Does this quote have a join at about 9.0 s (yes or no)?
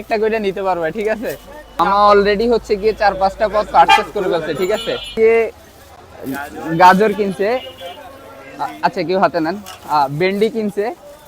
no